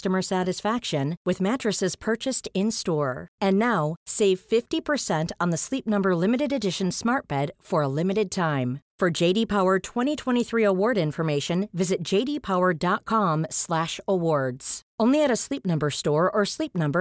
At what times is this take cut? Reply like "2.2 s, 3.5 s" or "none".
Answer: none